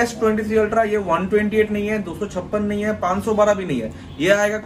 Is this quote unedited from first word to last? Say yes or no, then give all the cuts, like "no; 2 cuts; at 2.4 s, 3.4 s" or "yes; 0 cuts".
yes; 0 cuts